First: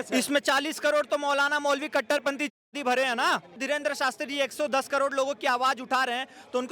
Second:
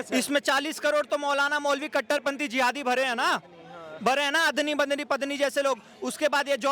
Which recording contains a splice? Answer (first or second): first